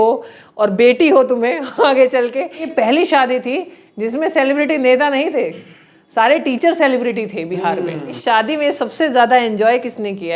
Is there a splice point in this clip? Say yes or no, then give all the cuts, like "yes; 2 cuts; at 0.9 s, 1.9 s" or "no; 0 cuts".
yes; 2 cuts; at 2.7 s, 8.1 s